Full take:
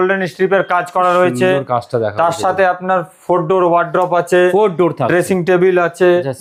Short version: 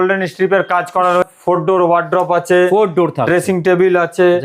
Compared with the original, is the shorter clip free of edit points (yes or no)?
no